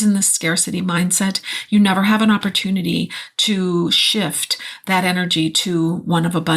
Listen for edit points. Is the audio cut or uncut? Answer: uncut